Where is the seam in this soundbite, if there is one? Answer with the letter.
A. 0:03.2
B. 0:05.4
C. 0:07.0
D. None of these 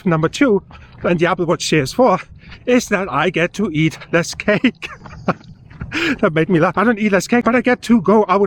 C